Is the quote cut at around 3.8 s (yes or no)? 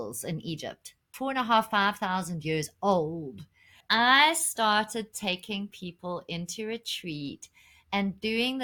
yes